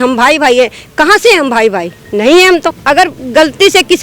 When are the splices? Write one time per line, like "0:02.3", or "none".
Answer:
0:02.7